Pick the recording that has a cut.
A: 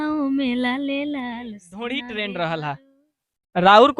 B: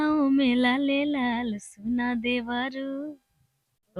A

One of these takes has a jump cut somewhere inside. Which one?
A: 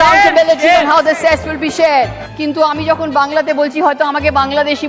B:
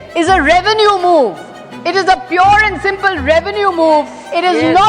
A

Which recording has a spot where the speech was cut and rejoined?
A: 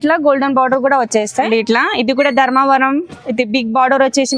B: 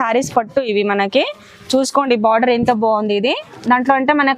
A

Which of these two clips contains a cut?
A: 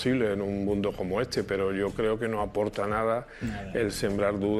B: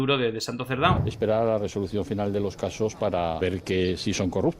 B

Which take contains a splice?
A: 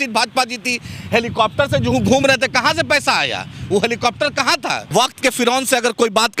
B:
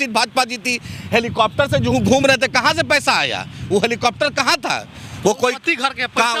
A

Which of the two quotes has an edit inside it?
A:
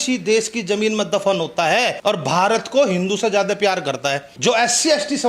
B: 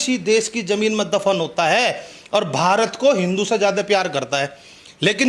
A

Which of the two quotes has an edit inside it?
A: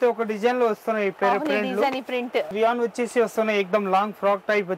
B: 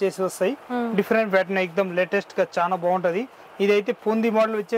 A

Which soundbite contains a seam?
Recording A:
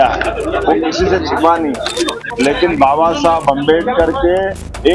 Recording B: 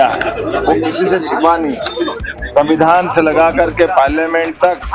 A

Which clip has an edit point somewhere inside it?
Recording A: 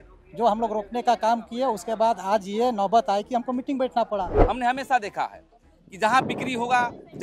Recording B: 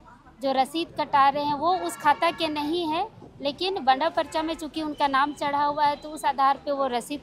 A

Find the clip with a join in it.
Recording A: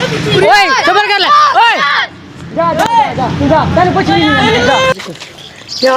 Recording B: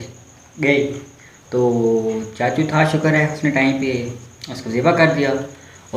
A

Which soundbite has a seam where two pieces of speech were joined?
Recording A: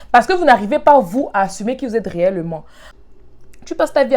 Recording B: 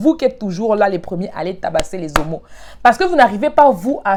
A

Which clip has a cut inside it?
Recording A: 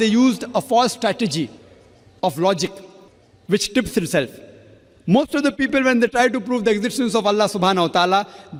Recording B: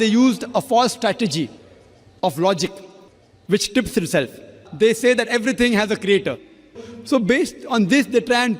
B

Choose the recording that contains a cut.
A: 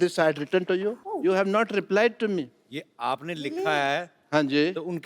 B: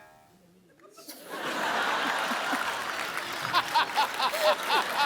A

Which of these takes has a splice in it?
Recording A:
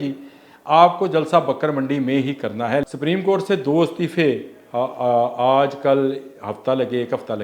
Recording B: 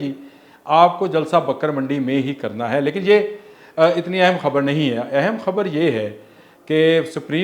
A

